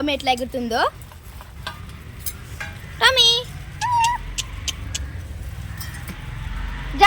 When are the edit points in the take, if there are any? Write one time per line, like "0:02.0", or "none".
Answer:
none